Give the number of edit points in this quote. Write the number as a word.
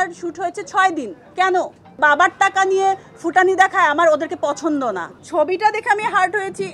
two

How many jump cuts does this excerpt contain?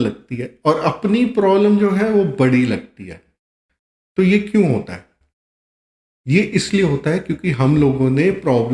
zero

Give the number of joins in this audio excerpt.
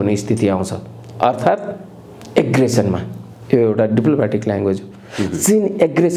zero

